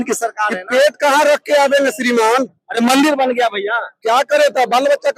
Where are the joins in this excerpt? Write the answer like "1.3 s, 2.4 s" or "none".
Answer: none